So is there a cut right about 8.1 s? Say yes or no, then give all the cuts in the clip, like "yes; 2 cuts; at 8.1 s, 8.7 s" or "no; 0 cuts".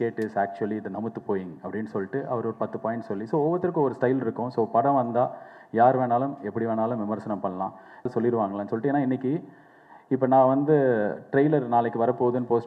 yes; 1 cut; at 8.1 s